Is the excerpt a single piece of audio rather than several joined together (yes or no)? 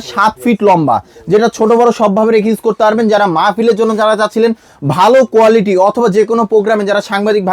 yes